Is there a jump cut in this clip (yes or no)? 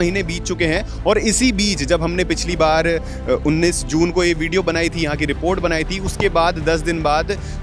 no